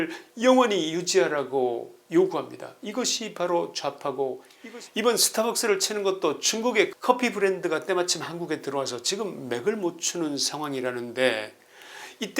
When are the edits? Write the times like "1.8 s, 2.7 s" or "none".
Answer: 4.5 s